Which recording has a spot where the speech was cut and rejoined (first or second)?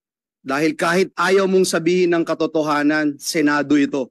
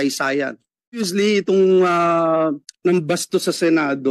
second